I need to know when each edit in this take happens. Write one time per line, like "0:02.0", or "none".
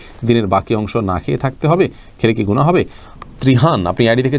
0:03.0